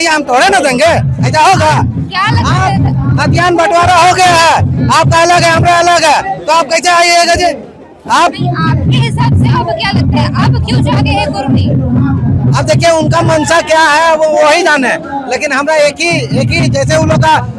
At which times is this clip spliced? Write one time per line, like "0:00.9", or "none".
none

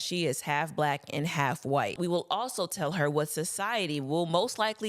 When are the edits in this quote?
0:01.9

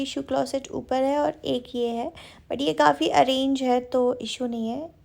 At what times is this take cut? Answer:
none

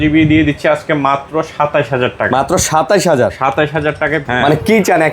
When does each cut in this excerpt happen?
0:04.2

